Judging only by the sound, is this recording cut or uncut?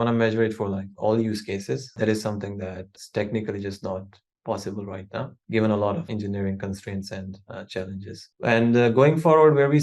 cut